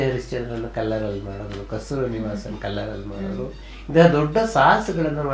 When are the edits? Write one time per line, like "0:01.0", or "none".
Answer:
none